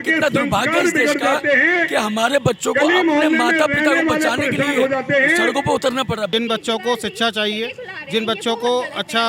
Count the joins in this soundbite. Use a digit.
1